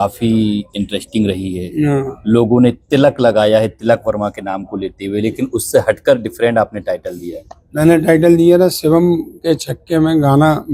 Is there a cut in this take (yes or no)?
no